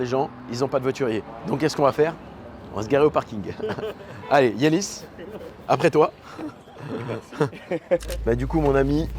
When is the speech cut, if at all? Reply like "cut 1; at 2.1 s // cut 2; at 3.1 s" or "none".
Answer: none